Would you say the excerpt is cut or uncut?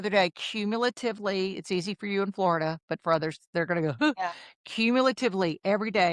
uncut